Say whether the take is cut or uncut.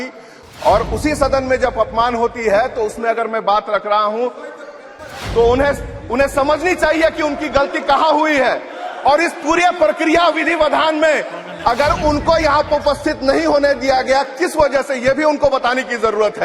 uncut